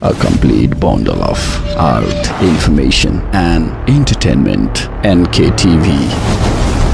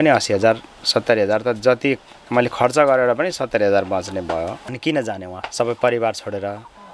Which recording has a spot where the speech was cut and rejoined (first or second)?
second